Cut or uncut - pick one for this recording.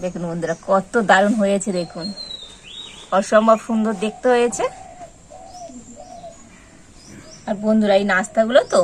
cut